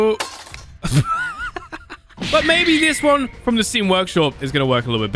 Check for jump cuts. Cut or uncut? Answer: cut